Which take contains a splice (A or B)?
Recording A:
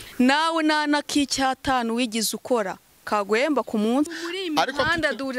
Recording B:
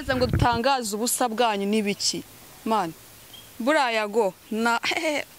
A